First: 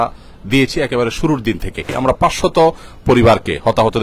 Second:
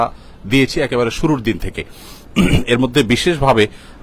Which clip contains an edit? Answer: first; 1 cut; at 2.0 s

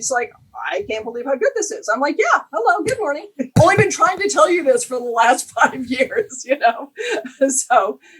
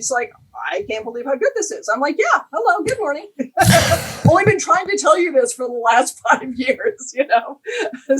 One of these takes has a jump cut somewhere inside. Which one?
first; 1 cut; at 3.4 s

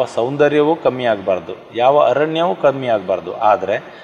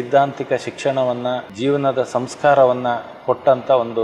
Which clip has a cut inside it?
second; 1 cut; at 1.5 s

